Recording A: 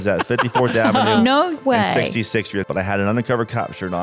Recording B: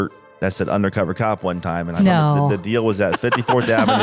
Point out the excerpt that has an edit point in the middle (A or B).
A